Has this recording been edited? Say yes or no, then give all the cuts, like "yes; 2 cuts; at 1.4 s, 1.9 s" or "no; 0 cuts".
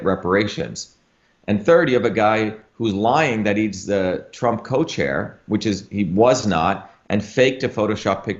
no; 0 cuts